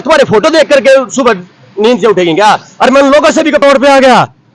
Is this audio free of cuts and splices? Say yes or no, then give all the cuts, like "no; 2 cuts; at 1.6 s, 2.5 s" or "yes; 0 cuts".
no; 1 cut; at 3.6 s